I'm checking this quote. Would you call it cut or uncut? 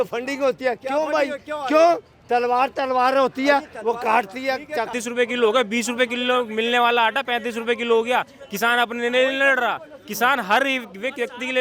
cut